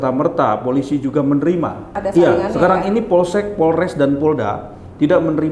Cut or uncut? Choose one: cut